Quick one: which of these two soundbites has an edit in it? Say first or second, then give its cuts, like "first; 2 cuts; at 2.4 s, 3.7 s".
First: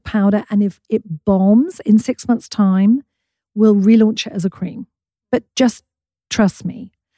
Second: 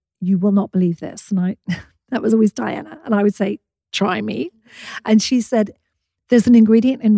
first; 1 cut; at 5.4 s